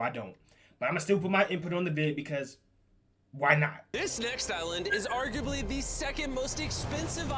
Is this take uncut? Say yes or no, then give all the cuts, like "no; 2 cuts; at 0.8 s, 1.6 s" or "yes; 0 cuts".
no; 1 cut; at 3.8 s